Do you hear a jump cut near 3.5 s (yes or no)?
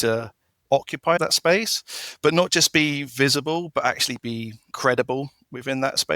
no